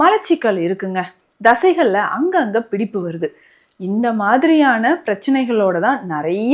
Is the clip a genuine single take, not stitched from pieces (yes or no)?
yes